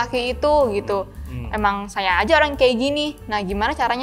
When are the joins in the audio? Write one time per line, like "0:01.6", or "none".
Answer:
none